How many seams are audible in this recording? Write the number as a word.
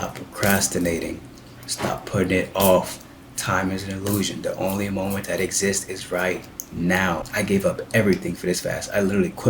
one